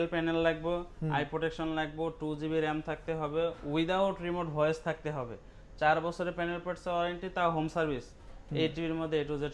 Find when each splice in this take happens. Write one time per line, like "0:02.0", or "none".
none